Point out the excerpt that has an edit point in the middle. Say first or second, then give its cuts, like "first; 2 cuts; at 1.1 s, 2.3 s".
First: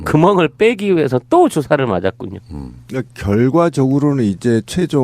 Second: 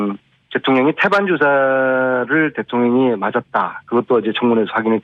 second; 1 cut; at 1.1 s